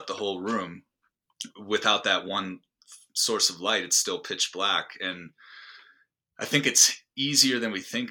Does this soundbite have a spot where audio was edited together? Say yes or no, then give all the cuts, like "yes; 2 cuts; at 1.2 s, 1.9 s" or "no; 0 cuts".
no; 0 cuts